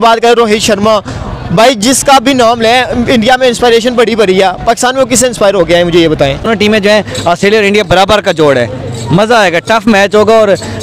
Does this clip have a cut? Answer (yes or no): no